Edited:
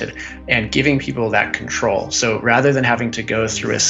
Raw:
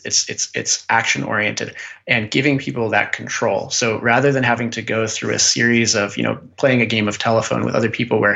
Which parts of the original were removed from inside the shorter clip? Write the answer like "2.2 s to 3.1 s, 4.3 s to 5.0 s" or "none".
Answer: none